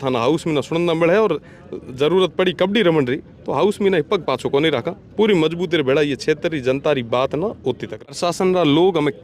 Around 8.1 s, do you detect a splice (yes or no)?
yes